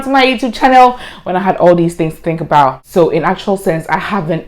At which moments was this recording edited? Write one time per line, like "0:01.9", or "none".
0:02.8